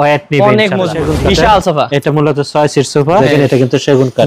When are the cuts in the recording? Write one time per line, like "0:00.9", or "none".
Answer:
0:01.0
0:03.2